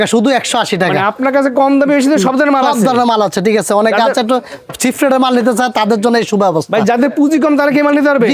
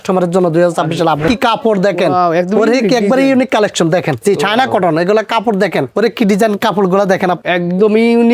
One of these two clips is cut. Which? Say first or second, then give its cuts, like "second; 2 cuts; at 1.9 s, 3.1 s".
second; 4 cuts; at 1.2 s, 4.2 s, 5.9 s, 7.4 s